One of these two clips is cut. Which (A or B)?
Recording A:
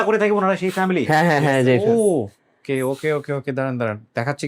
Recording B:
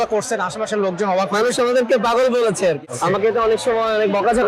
B